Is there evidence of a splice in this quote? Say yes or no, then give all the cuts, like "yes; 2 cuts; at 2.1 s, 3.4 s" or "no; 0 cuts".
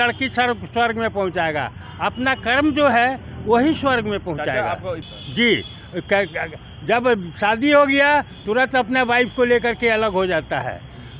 no; 0 cuts